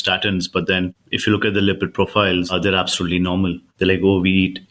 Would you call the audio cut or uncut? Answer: cut